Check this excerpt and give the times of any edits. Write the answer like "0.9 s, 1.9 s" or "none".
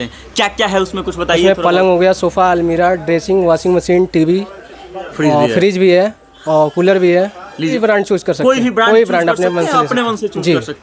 7.8 s